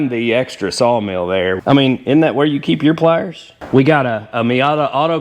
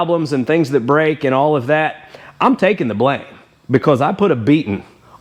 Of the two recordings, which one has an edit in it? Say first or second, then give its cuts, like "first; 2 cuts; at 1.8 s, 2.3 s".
first; 2 cuts; at 1.6 s, 3.6 s